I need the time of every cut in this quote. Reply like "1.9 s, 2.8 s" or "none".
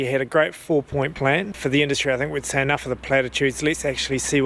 1.6 s